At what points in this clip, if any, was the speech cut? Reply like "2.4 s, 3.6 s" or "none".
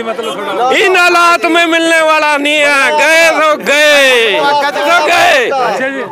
4.8 s